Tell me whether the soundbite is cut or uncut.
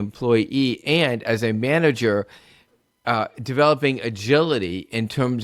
uncut